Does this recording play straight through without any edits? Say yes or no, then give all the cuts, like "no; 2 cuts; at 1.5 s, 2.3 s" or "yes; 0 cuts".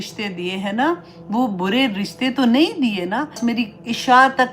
no; 1 cut; at 3.4 s